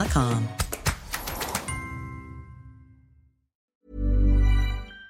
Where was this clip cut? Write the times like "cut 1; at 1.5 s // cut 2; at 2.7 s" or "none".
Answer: cut 1; at 3.7 s